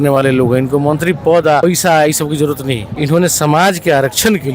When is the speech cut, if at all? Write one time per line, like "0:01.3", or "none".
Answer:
0:01.6
0:02.9